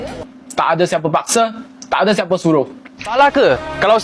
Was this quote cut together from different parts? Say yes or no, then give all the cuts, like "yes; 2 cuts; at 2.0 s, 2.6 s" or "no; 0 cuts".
yes; 1 cut; at 3.0 s